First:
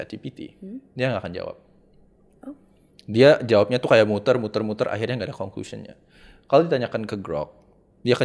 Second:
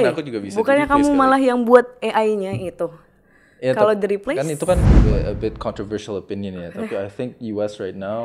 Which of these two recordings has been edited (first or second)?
second